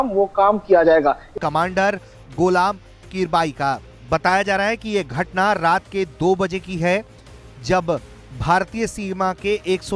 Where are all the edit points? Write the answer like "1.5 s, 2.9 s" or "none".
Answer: 1.3 s